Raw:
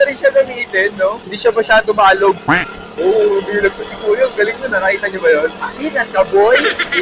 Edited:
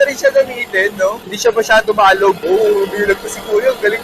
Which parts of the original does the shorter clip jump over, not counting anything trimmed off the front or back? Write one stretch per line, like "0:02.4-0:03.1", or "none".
0:02.4-0:02.9